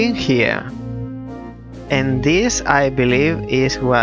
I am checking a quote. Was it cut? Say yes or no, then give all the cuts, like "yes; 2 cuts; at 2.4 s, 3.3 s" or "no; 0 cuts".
no; 0 cuts